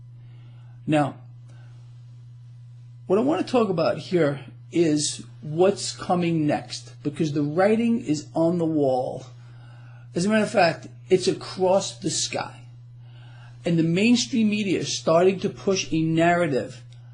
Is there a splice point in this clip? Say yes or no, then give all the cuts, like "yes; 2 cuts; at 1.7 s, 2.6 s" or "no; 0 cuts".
yes; 1 cut; at 15.4 s